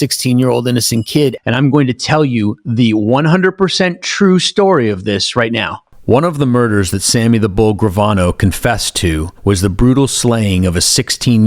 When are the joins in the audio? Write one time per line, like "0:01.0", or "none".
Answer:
0:01.4
0:09.3

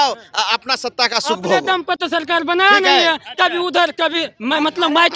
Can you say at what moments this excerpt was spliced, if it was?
none

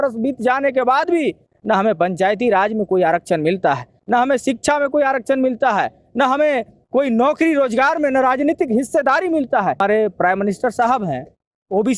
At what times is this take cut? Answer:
0:09.8

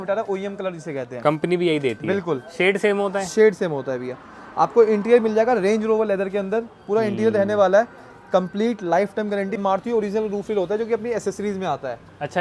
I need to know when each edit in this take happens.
0:09.6

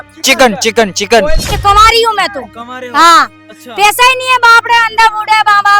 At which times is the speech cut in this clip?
0:01.6

